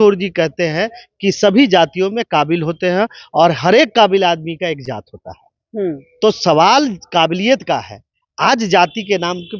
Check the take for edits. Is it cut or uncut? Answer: uncut